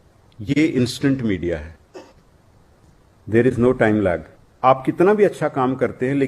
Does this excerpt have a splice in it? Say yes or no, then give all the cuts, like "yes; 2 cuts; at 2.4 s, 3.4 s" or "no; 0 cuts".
yes; 1 cut; at 4.5 s